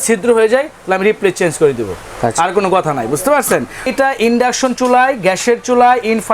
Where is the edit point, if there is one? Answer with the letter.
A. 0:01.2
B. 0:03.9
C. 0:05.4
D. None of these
B